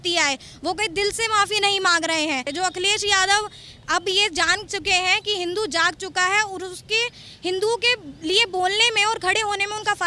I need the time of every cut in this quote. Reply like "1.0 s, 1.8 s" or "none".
2.5 s